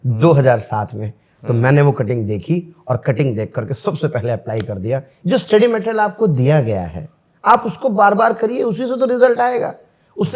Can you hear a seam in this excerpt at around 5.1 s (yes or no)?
yes